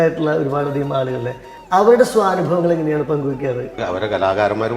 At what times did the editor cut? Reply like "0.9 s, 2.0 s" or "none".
1.5 s, 3.8 s